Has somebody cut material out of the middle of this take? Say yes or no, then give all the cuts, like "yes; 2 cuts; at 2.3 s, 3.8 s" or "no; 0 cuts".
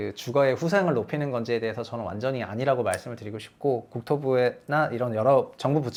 no; 0 cuts